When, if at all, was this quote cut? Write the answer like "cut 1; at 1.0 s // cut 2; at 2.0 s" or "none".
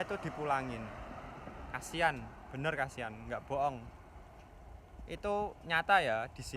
none